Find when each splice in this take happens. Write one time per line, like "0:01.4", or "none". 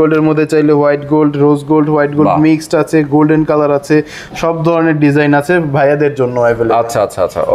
none